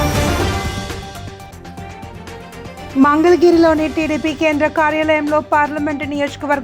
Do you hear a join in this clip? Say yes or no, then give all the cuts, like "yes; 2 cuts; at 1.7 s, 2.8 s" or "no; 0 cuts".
yes; 2 cuts; at 1.5 s, 2.9 s